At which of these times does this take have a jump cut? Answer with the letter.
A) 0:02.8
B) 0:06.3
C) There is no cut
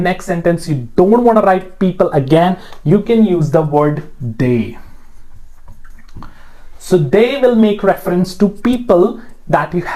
C